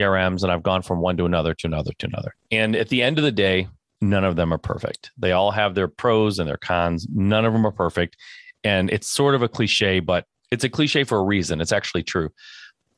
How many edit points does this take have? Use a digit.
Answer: 3